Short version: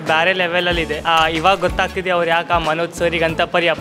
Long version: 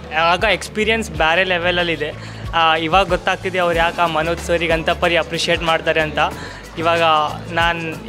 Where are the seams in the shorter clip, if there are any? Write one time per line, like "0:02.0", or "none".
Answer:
0:01.0